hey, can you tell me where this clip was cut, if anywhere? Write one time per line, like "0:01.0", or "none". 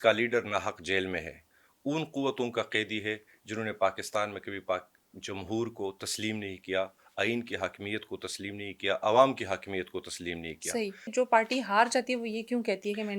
0:11.1